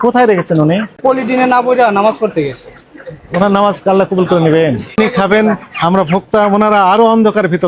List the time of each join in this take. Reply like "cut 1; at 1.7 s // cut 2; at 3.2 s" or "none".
cut 1; at 0.9 s // cut 2; at 5.0 s